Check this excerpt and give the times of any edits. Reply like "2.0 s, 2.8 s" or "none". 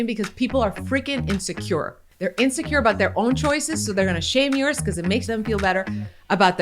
2.0 s, 5.2 s